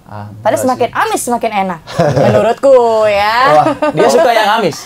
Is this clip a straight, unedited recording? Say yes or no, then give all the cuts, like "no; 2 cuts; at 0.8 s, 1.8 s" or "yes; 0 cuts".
yes; 0 cuts